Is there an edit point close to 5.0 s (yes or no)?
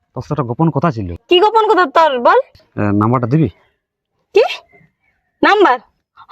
no